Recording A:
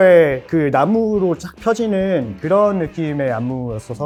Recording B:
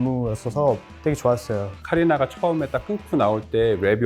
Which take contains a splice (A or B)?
B